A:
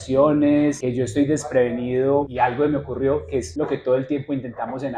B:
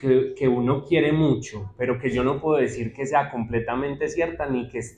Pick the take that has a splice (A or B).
A